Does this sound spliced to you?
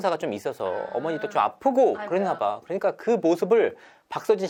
no; 0 cuts

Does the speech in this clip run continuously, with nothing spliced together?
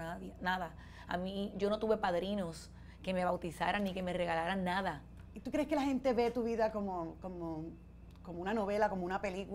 yes; 0 cuts

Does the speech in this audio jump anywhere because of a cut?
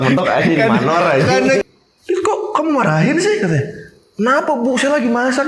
yes; 1 cut; at 1.6 s

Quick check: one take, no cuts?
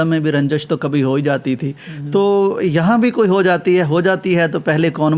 yes; 0 cuts

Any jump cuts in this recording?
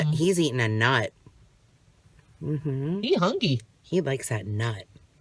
no; 0 cuts

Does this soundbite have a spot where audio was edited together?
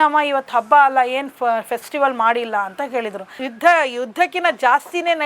yes; 1 cut; at 3.4 s

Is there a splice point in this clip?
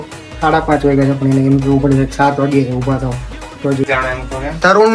yes; 1 cut; at 3.8 s

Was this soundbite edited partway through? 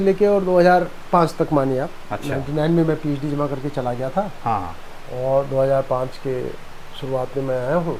no; 0 cuts

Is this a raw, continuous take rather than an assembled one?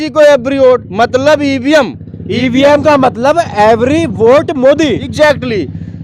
yes; 0 cuts

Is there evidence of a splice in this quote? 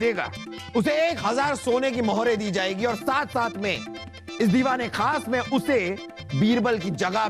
no; 0 cuts

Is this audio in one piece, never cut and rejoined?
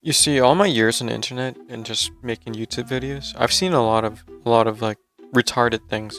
yes; 0 cuts

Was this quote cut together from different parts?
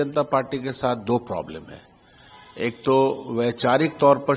no; 0 cuts

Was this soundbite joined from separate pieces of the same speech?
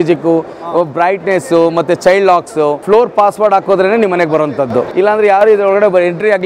yes; 2 cuts; at 2.8 s, 4.9 s

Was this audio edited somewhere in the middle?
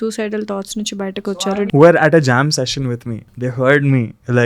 yes; 2 cuts; at 1.3 s, 3.3 s

